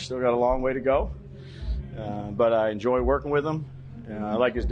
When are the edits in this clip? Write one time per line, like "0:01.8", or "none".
none